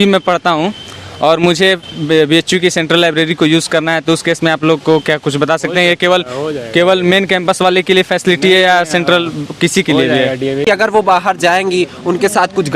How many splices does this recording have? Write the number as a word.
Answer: one